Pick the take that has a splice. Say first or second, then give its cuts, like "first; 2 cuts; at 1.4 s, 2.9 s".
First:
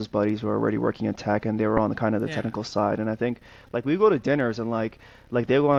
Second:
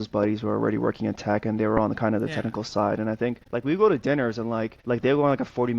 second; 2 cuts; at 3.4 s, 4.7 s